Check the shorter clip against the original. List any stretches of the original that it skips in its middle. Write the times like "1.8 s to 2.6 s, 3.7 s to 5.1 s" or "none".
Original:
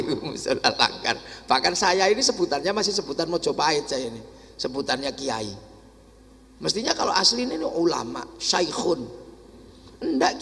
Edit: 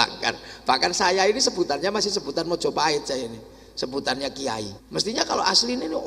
5.6 s to 6.5 s